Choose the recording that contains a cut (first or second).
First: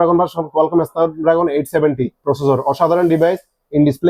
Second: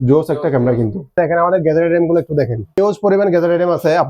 second